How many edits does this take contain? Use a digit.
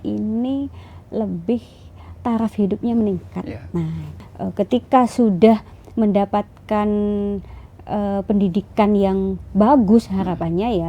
1